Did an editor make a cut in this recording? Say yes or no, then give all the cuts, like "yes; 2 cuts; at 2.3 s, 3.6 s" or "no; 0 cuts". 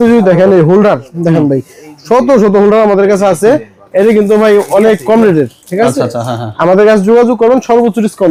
no; 0 cuts